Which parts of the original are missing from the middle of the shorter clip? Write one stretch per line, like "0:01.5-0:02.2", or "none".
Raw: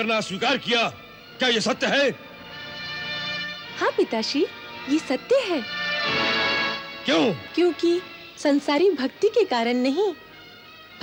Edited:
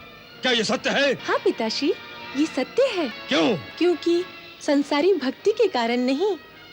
0:02.2-0:03.7
0:05.7-0:06.9